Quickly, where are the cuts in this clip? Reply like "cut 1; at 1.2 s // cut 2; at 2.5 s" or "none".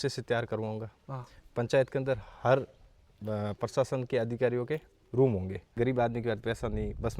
cut 1; at 5.7 s